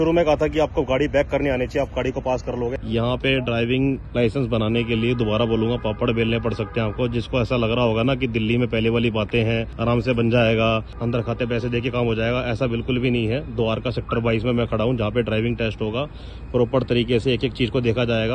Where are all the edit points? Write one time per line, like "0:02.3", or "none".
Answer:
0:02.7
0:09.7
0:11.0